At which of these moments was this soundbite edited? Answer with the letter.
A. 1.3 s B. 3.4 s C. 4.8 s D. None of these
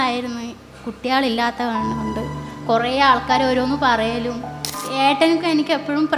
C